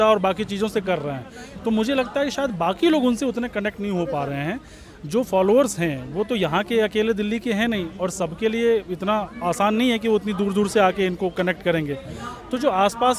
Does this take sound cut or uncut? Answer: uncut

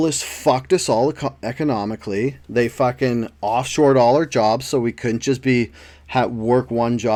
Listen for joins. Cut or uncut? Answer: uncut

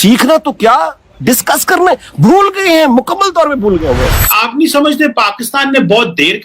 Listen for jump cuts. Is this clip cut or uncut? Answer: cut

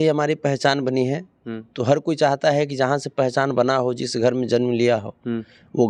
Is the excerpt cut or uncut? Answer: uncut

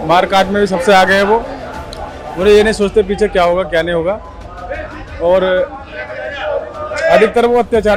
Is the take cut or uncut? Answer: uncut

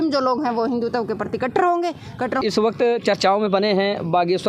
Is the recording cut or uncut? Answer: cut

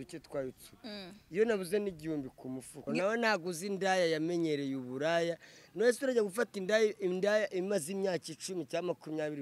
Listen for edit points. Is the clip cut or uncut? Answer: cut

